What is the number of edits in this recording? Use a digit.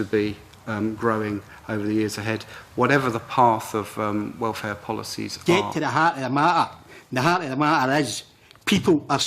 1